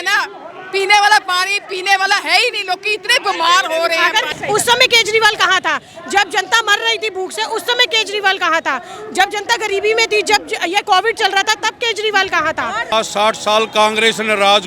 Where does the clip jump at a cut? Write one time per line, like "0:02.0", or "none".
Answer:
0:04.3
0:12.9